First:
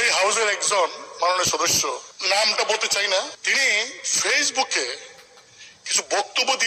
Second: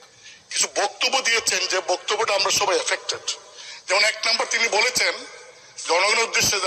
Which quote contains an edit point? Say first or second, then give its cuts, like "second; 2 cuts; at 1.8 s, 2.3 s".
first; 2 cuts; at 2.1 s, 3.4 s